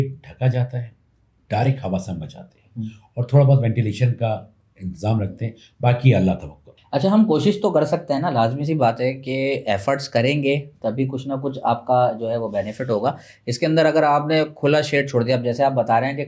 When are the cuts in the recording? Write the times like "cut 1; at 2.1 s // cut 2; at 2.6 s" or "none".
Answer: none